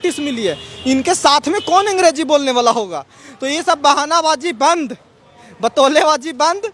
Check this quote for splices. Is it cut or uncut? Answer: uncut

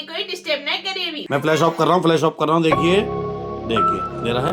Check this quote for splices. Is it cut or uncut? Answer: cut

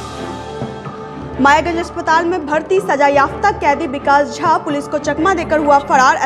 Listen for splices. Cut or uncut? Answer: cut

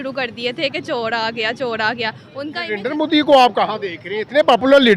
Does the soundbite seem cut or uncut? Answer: cut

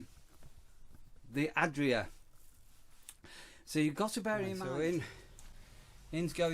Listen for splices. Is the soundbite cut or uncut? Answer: cut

